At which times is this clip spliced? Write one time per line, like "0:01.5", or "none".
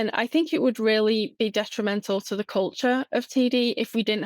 none